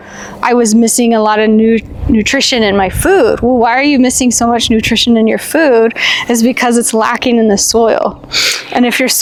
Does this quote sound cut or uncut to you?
uncut